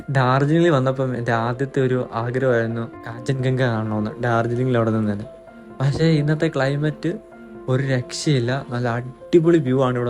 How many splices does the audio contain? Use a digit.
0